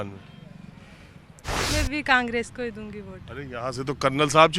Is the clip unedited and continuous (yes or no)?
no